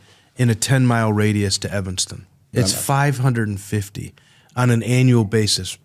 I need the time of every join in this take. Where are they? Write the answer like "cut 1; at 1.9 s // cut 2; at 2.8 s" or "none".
cut 1; at 2.5 s